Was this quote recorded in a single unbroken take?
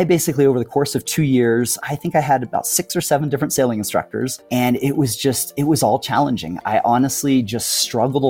no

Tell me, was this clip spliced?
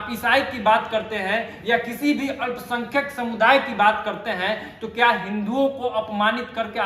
no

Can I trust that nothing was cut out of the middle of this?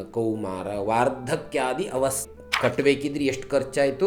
no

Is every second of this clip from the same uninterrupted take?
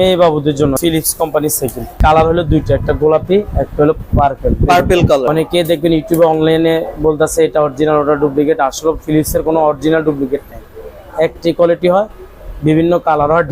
no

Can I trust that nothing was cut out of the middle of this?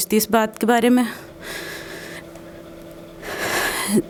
yes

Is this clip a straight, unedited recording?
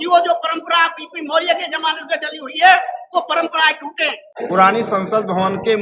no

